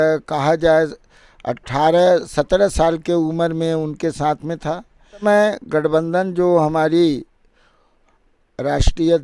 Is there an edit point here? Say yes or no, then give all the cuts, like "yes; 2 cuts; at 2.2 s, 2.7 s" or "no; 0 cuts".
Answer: yes; 1 cut; at 5.2 s